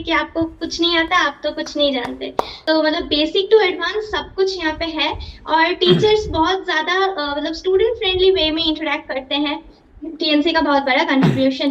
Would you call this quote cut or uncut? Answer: cut